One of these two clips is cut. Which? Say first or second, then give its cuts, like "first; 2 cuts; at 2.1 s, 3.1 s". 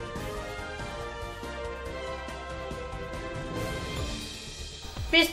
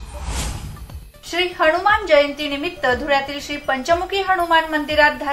first; 1 cut; at 4.4 s